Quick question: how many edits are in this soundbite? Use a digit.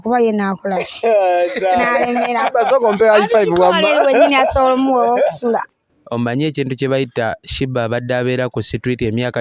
1